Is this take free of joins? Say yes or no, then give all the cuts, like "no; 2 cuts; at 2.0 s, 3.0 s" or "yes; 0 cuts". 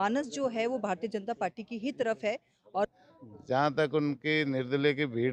no; 1 cut; at 2.9 s